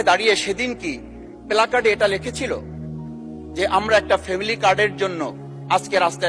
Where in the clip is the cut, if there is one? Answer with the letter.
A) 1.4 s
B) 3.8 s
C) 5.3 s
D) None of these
D